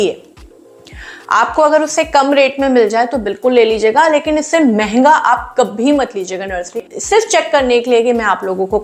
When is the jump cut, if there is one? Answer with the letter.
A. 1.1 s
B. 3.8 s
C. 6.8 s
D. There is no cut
C